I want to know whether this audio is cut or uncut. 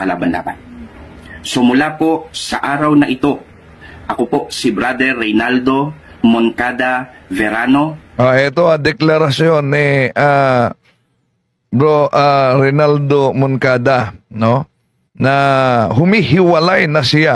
uncut